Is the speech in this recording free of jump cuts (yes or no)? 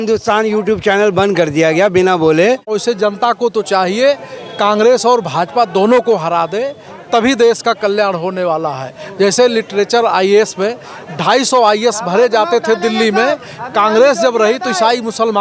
no